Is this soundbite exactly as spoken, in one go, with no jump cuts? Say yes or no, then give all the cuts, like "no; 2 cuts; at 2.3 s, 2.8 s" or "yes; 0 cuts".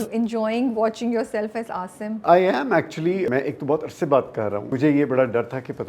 no; 2 cuts; at 3.3 s, 4.7 s